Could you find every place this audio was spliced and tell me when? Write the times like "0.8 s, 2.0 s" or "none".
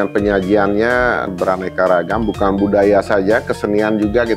1.3 s